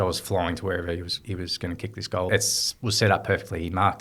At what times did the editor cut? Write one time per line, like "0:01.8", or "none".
0:02.3